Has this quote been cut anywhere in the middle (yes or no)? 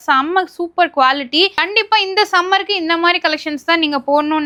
no